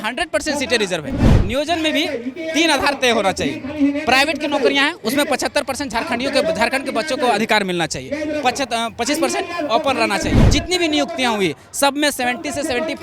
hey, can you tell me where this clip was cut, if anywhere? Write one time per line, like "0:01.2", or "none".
0:01.3
0:10.4